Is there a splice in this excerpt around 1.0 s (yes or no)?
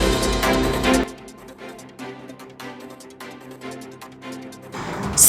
yes